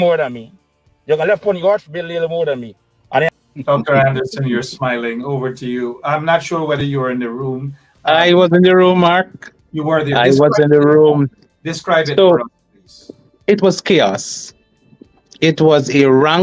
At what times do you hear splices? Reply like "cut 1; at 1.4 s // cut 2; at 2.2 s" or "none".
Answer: cut 1; at 3.3 s